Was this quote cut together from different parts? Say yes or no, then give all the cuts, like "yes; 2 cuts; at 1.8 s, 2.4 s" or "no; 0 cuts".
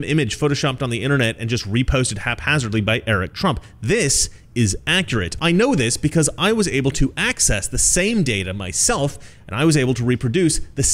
no; 0 cuts